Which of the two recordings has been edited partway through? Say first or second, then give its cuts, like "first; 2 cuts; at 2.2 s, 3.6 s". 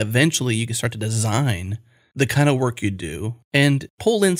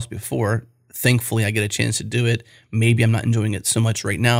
first; 2 cuts; at 2.0 s, 3.5 s